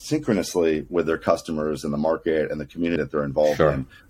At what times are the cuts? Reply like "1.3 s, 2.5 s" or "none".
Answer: 3.0 s

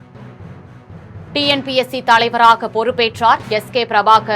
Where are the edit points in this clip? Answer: 1.0 s

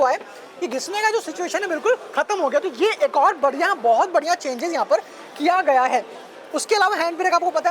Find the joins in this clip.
none

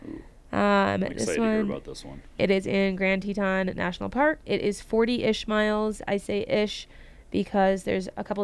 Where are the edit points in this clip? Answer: 2.4 s, 4.4 s

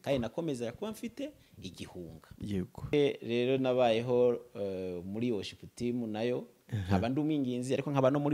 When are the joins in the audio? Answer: 2.9 s

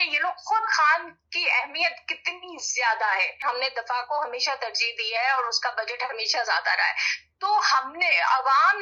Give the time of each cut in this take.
3.3 s

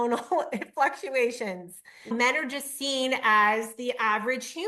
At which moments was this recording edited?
2.0 s

